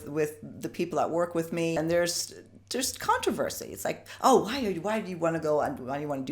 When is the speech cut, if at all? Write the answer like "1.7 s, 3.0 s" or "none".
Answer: 1.7 s